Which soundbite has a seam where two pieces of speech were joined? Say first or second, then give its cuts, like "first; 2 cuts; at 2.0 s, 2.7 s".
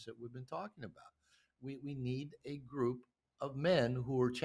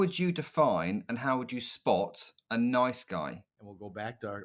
second; 1 cut; at 3.5 s